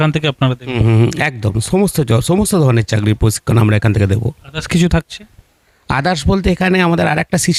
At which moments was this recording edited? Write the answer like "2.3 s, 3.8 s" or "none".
none